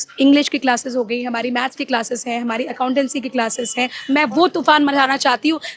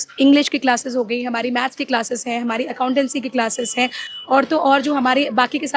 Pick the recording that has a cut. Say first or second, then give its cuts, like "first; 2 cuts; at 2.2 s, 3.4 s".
first; 1 cut; at 4.0 s